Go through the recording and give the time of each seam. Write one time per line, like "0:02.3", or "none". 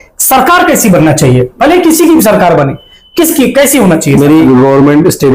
0:04.4